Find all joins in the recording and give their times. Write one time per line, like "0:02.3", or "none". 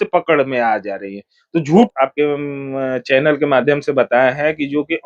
0:01.9